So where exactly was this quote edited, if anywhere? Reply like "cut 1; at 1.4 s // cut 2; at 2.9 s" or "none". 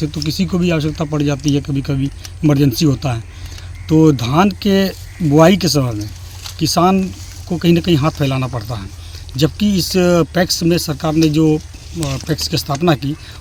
none